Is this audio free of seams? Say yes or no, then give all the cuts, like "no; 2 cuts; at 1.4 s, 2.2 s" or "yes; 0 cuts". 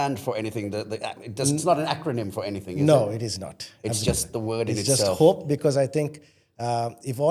yes; 0 cuts